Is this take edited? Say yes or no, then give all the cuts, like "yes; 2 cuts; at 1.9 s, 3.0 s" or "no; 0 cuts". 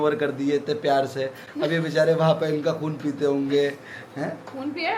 no; 0 cuts